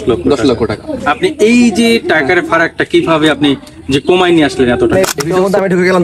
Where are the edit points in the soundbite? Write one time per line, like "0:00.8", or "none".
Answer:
0:04.9